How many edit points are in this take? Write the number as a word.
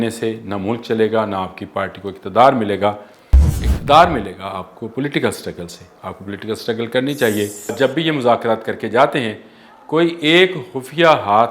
one